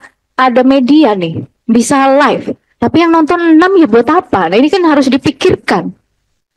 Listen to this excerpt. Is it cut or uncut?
uncut